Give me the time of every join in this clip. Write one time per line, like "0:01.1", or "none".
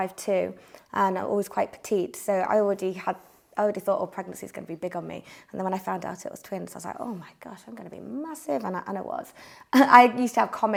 none